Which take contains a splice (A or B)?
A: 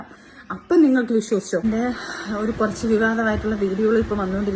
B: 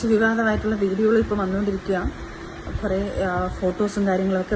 A